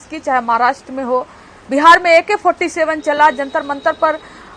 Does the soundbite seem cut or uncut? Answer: uncut